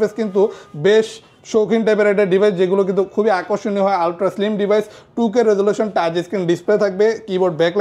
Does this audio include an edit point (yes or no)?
no